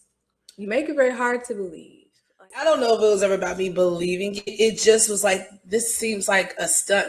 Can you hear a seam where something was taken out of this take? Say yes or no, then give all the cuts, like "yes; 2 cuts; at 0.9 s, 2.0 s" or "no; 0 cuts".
yes; 1 cut; at 2.5 s